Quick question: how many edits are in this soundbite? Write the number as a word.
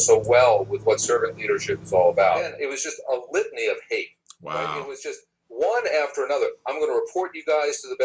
one